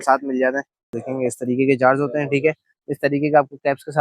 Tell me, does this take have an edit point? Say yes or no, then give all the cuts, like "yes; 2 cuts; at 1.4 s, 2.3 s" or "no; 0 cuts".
yes; 1 cut; at 1.0 s